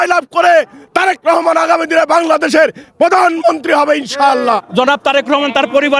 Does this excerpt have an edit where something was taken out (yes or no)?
yes